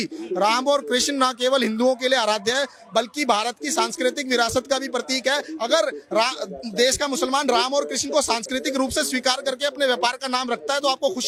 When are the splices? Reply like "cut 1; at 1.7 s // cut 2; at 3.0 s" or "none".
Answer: none